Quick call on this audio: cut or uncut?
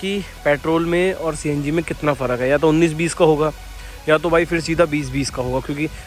uncut